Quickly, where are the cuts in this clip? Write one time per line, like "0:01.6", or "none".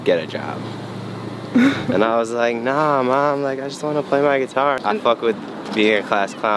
0:04.8